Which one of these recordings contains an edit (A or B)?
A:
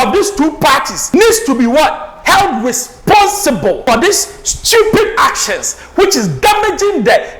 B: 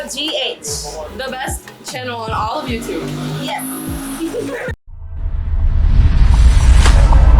A